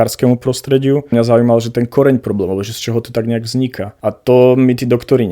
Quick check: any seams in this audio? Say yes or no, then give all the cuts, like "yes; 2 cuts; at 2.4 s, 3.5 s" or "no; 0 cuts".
yes; 2 cuts; at 1.1 s, 3.9 s